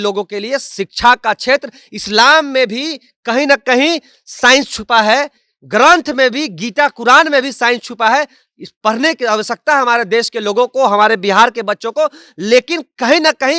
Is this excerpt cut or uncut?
uncut